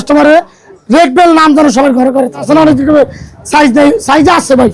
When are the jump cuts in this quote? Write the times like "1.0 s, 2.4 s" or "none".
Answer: 2.5 s